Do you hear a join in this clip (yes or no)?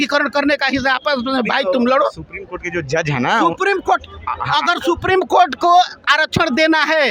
no